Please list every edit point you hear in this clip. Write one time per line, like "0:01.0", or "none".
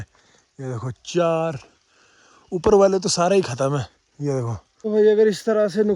0:04.9